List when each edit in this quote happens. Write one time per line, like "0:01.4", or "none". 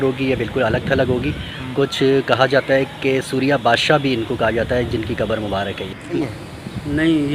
0:06.2